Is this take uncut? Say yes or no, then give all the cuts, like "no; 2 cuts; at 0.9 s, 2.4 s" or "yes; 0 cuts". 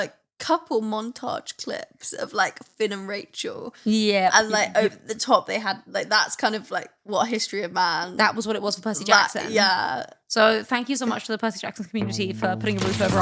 yes; 0 cuts